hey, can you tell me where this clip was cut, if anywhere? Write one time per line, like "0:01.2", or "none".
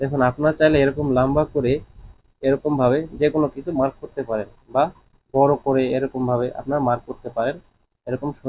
none

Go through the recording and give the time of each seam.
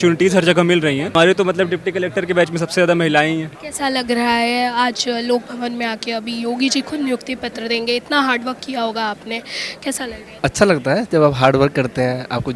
none

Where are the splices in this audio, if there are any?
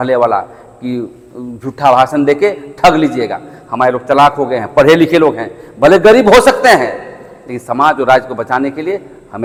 none

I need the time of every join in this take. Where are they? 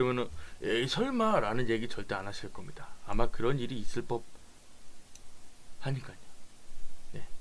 0:02.1

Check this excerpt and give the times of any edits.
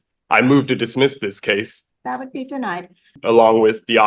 0:01.8
0:03.2

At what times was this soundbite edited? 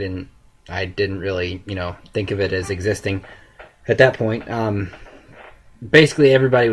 0:01.6

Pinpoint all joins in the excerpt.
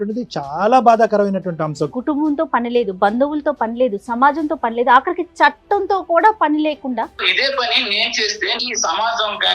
0:01.9
0:07.2
0:08.6

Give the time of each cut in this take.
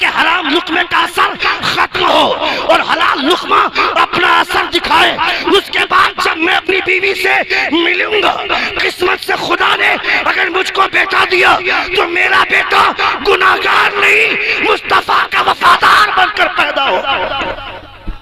none

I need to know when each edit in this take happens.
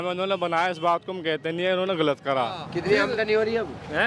0:02.7

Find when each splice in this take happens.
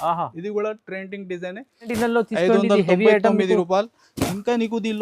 0:01.9

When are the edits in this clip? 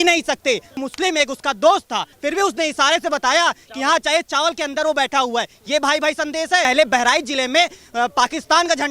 0:00.8
0:02.1
0:06.6

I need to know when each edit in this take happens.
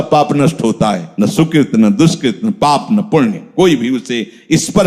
0:01.1

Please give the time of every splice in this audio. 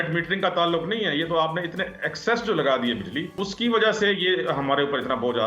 0:03.3

